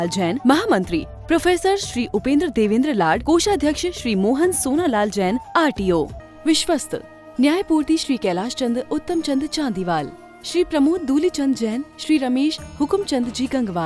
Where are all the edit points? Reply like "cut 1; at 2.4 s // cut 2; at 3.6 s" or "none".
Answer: cut 1; at 6.2 s

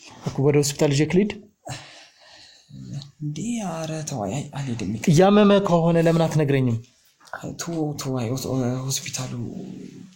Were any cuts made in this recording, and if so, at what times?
none

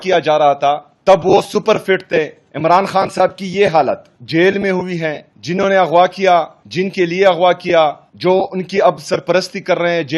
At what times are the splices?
cut 1; at 0.9 s // cut 2; at 2.4 s // cut 3; at 4.1 s // cut 4; at 5.3 s // cut 5; at 6.6 s // cut 6; at 8.1 s

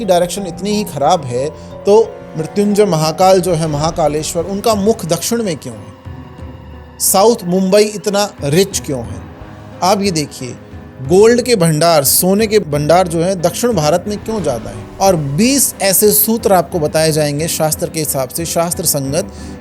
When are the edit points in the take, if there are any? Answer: cut 1; at 14.8 s

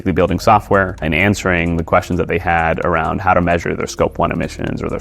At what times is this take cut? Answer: none

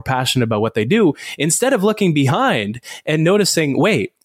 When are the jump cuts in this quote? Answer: none

